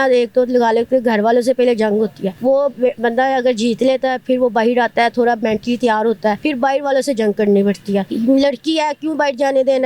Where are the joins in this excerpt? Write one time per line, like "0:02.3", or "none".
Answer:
0:02.3
0:06.4
0:08.1